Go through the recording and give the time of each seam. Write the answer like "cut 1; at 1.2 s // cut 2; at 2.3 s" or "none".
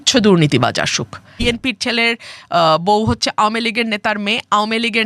cut 1; at 1.4 s